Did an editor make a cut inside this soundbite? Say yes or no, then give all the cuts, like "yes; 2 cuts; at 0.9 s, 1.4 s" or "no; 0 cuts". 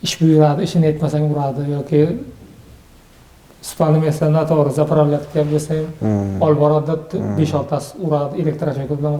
no; 0 cuts